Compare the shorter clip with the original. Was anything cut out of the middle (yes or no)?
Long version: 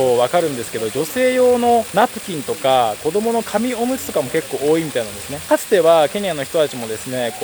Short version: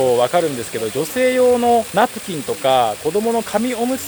no